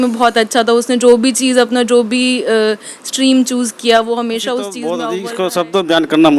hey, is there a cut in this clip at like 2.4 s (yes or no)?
no